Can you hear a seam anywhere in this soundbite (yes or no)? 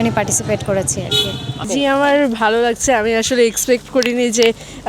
yes